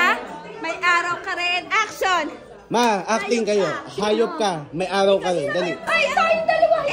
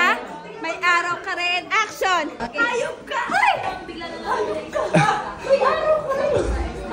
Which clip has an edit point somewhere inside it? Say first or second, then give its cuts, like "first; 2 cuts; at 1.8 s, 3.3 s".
second; 1 cut; at 2.4 s